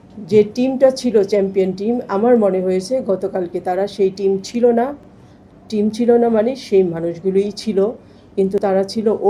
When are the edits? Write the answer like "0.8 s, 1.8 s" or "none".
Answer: none